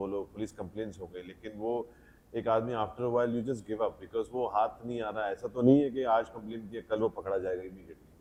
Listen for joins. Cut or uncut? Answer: uncut